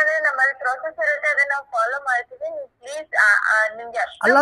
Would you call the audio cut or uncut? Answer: uncut